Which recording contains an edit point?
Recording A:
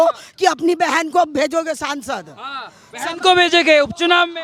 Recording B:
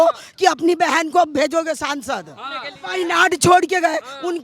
B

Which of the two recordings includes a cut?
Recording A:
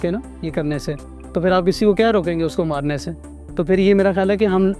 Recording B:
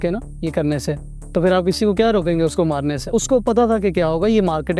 B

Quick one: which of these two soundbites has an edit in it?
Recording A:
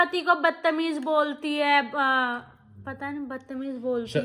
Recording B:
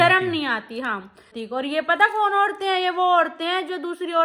B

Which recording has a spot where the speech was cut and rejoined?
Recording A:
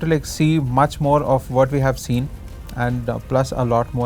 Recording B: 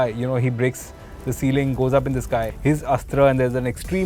B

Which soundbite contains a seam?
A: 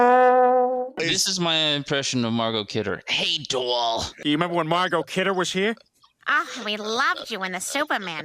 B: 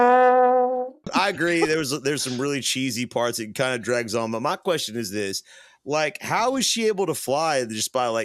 A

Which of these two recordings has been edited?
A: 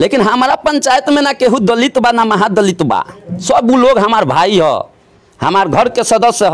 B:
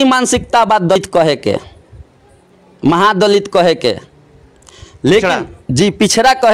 B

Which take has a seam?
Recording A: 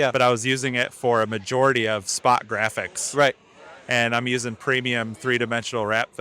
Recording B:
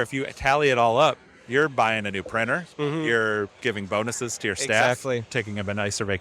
B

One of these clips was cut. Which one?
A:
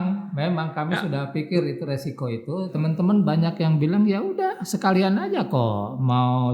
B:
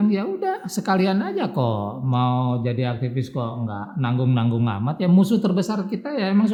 A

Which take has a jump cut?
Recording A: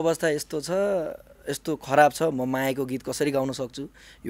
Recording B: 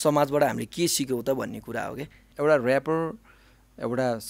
B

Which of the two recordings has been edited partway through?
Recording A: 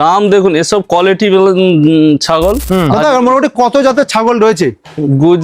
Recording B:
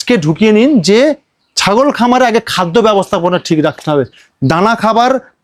A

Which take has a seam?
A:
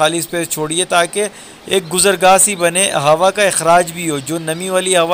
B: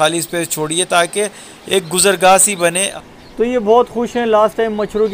B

